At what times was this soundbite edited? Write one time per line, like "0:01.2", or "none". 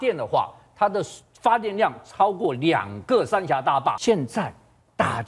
0:04.0